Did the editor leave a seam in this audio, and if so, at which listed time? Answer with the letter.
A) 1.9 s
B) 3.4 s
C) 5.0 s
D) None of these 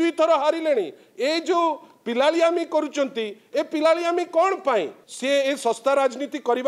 C